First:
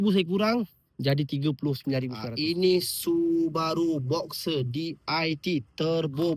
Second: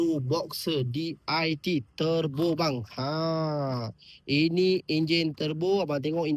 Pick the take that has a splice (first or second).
first